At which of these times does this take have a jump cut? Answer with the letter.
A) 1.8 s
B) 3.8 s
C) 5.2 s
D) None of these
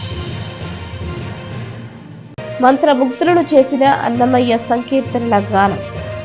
A